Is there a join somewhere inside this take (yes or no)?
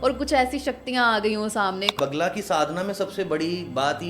yes